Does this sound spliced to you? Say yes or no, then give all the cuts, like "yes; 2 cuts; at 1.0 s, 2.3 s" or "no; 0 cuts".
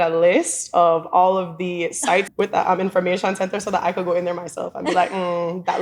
yes; 1 cut; at 2.3 s